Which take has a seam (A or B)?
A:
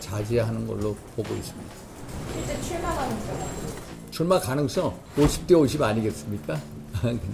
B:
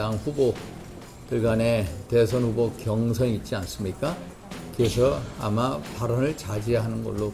A